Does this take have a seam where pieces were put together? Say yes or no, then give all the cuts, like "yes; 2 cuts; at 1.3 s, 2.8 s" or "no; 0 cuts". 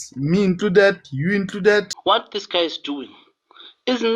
yes; 1 cut; at 1.9 s